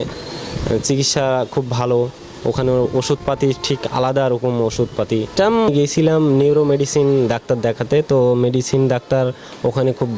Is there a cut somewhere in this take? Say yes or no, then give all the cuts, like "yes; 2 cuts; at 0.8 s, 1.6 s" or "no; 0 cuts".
yes; 1 cut; at 5.7 s